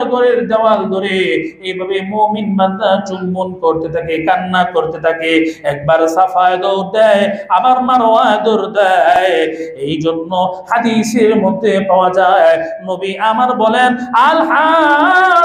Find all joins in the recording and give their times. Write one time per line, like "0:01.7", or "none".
0:09.6